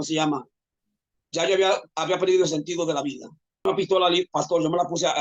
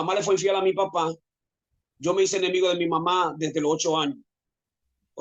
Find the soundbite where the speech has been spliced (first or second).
first